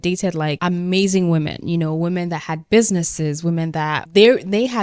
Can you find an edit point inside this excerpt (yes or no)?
no